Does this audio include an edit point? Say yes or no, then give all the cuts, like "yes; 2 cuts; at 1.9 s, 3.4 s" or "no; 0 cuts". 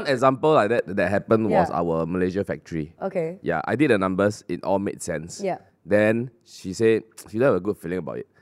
no; 0 cuts